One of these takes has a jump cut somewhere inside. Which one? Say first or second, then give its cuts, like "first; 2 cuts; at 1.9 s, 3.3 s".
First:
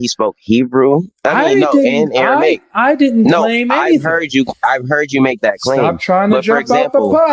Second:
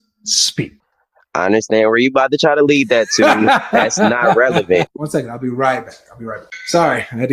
second; 2 cuts; at 5.0 s, 6.5 s